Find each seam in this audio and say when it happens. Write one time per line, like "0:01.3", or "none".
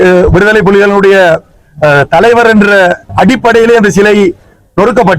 0:03.1